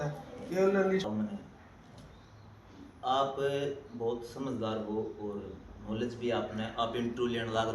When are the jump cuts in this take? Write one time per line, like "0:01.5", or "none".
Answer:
0:01.1